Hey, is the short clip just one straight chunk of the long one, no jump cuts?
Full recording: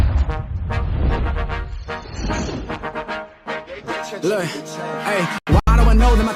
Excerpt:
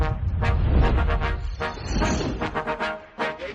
yes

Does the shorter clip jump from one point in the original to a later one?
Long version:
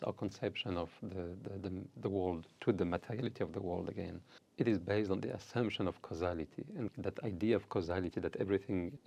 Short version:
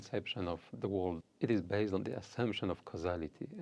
yes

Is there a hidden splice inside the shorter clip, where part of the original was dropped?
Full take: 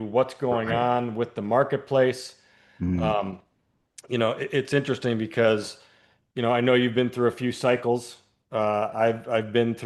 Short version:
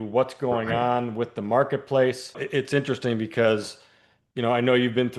yes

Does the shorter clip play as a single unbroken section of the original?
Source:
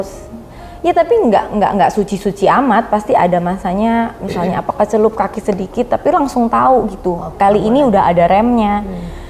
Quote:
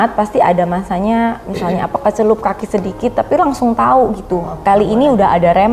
yes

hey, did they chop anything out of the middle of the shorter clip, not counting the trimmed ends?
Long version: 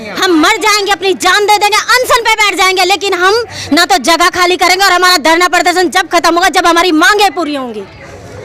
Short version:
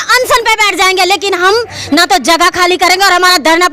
no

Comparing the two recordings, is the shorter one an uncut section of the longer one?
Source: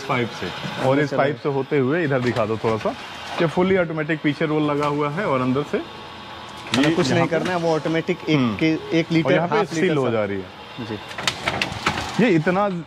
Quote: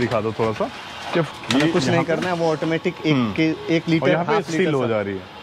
no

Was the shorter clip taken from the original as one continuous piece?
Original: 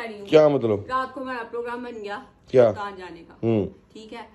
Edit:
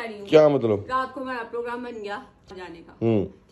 no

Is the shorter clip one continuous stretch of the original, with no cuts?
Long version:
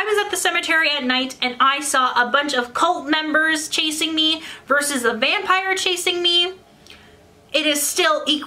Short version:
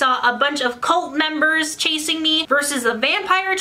no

